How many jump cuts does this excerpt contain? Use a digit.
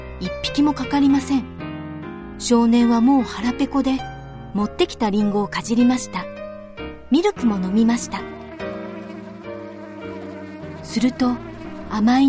1